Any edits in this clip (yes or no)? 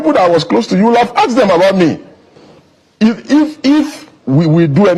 no